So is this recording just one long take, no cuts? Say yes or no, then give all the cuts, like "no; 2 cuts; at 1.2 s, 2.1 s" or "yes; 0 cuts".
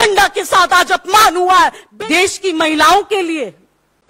no; 1 cut; at 1.8 s